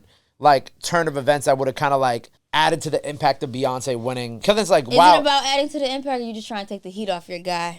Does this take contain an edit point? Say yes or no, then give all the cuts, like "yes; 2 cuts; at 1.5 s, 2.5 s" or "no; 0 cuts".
yes; 2 cuts; at 2.3 s, 4.4 s